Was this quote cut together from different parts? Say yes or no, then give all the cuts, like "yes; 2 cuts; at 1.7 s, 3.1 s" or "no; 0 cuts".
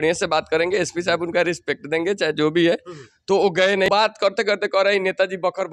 yes; 1 cut; at 3.9 s